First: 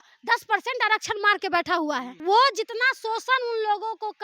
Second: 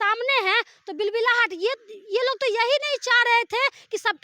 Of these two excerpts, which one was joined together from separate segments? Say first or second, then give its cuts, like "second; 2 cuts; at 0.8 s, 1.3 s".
first; 1 cut; at 2.1 s